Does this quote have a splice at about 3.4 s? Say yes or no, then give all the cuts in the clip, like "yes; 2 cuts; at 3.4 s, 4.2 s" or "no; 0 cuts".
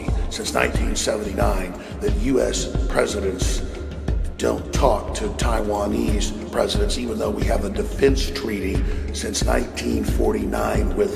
no; 1 cut; at 7.0 s